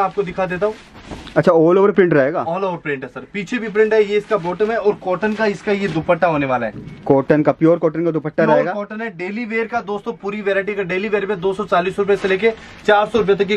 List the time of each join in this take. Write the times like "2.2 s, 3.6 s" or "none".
none